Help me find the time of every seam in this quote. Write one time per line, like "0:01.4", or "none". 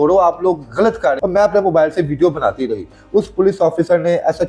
0:01.2